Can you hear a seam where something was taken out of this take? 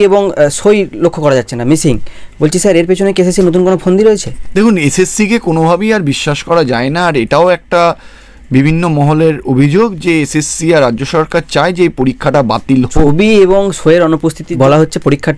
yes; 3 cuts; at 4.4 s, 13.1 s, 14.4 s

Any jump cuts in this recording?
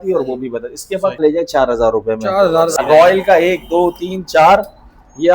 yes; 2 cuts; at 1.2 s, 2.7 s

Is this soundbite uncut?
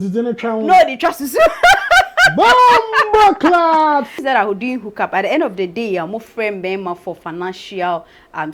no; 1 cut; at 4.2 s

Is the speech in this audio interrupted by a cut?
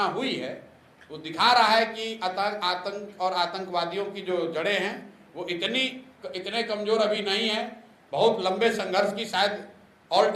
no; 0 cuts

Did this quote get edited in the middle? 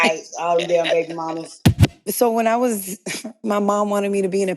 yes; 1 cut; at 1.8 s

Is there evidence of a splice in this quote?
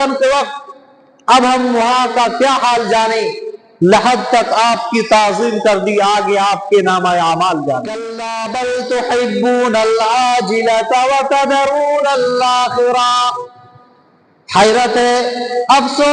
yes; 1 cut; at 8.5 s

